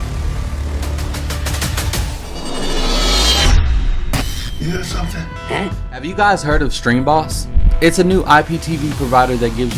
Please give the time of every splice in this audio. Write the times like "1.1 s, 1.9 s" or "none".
2.3 s